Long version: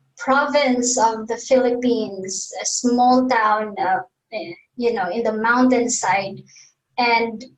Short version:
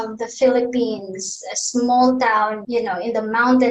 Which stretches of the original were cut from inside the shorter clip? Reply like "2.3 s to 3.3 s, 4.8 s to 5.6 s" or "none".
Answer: 3.7 s to 4.7 s